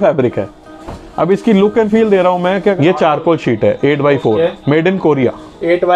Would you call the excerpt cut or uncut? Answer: cut